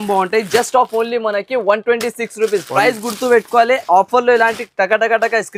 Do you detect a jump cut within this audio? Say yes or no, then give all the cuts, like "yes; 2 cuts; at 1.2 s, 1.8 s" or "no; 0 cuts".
no; 0 cuts